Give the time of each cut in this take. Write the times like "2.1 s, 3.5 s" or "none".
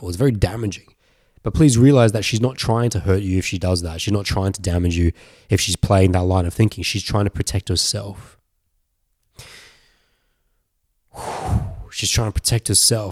none